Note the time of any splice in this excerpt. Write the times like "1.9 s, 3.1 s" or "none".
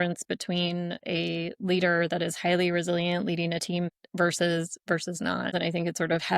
1.0 s, 3.9 s, 5.6 s